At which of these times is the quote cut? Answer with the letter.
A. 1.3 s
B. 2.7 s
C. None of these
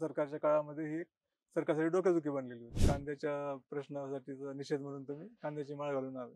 B